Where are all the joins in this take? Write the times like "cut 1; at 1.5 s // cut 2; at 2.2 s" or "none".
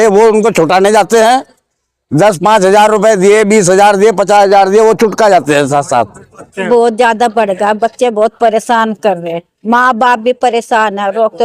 cut 1; at 6.7 s

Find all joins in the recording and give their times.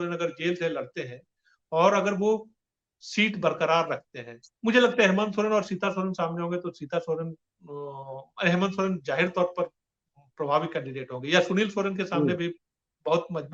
none

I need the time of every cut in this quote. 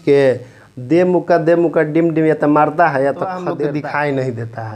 cut 1; at 3.5 s

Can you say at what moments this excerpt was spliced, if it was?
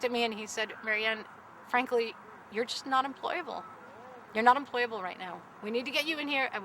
none

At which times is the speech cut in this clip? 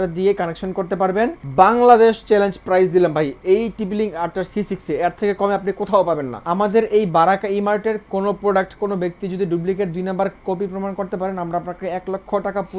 cut 1; at 1.4 s // cut 2; at 6.3 s

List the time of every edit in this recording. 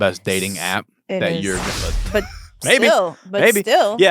cut 1; at 1.7 s

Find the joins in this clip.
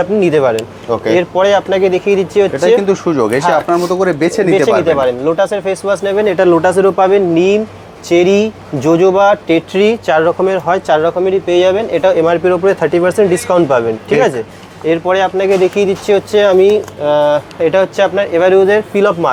none

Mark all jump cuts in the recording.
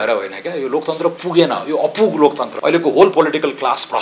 cut 1; at 2.5 s

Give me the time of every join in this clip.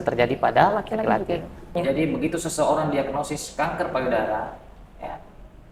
cut 1; at 1.8 s

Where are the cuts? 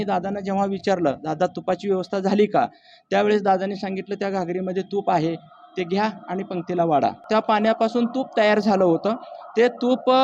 cut 1; at 7.2 s

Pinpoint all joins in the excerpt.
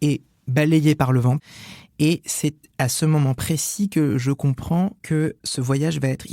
cut 1; at 1.4 s // cut 2; at 2.6 s // cut 3; at 5.0 s

